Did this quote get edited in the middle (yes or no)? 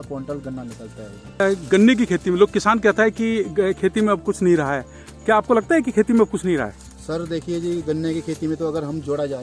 yes